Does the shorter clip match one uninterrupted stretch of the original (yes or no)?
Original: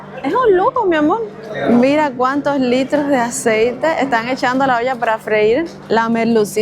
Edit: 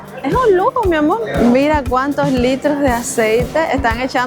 no